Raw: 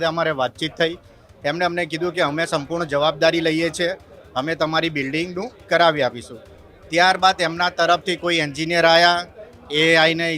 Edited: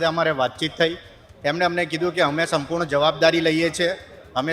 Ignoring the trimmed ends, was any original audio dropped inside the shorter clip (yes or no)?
no